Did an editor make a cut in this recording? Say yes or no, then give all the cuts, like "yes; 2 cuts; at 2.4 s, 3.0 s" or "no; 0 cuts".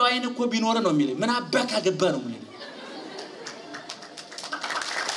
no; 0 cuts